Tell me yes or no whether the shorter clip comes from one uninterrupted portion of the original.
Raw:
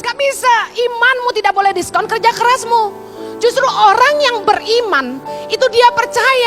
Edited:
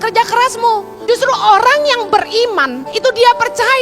no